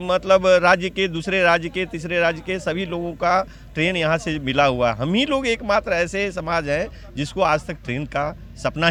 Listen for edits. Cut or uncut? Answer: uncut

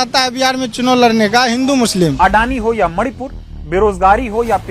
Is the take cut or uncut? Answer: cut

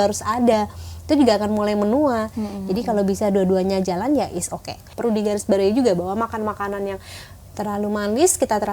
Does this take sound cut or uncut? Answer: cut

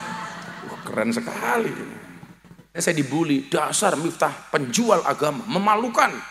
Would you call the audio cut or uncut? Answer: cut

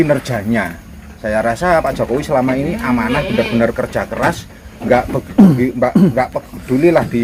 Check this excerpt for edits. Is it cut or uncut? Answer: uncut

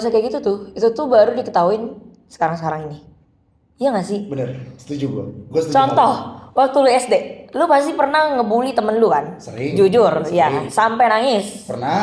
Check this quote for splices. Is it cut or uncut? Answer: uncut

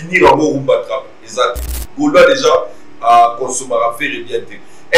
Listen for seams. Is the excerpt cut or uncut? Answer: cut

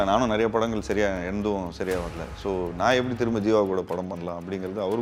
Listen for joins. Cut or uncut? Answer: uncut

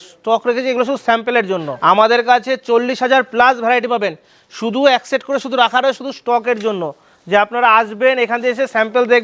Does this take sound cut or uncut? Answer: cut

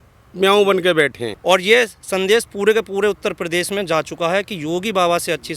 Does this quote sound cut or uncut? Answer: cut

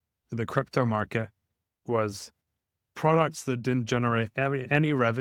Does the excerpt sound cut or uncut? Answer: uncut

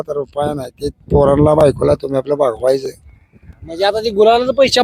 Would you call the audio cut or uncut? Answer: uncut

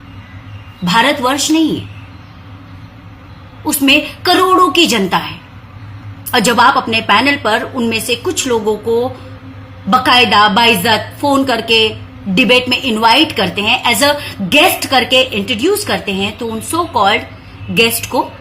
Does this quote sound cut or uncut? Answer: uncut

